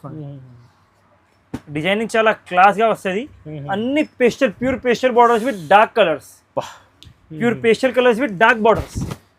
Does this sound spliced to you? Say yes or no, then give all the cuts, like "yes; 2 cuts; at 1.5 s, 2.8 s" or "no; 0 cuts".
no; 0 cuts